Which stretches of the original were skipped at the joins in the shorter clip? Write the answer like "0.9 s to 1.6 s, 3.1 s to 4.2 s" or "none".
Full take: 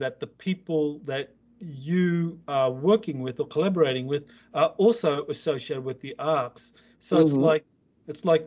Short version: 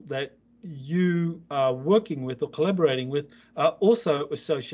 none